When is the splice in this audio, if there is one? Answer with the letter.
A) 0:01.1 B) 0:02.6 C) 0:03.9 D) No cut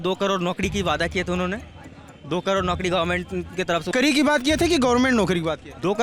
C